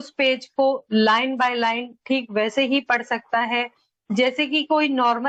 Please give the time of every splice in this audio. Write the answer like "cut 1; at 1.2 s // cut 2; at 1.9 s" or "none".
none